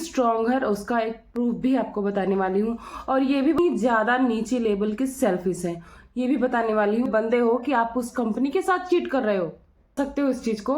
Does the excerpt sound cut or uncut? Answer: cut